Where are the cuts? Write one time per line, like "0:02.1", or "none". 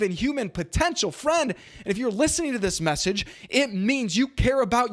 none